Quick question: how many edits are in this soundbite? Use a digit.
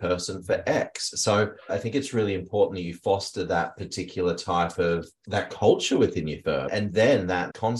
3